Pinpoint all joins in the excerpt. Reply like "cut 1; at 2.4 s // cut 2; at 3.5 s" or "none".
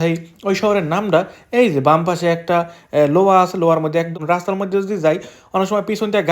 cut 1; at 4.2 s